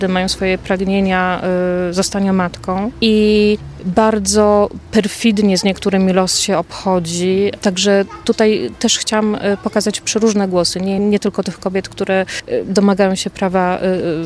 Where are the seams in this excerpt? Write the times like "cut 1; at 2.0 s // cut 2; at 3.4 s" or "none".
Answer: cut 1; at 2.9 s // cut 2; at 3.7 s // cut 3; at 4.8 s // cut 4; at 7.6 s // cut 5; at 11.0 s // cut 6; at 12.4 s